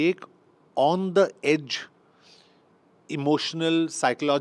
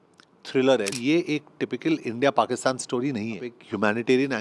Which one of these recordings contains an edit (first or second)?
second